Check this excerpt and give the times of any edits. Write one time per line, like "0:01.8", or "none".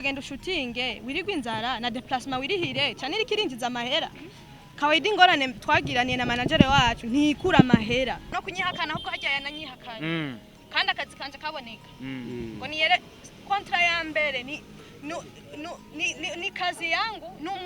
0:08.3